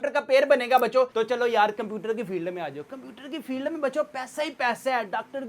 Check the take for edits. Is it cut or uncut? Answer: cut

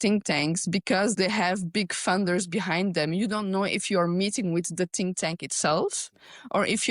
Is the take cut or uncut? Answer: cut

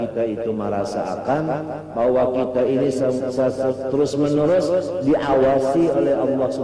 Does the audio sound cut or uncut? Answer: uncut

